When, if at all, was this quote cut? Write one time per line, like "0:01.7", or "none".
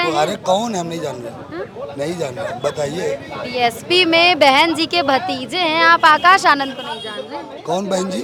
none